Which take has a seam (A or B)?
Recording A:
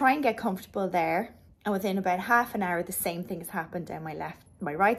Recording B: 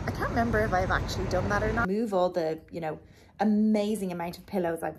B